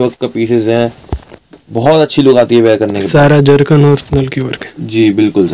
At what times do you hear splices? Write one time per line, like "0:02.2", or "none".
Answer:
none